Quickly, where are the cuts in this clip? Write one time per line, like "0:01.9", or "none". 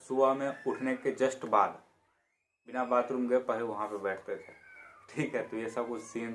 none